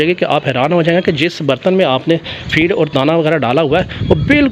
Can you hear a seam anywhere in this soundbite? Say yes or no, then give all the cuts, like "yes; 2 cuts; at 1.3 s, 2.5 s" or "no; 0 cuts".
no; 0 cuts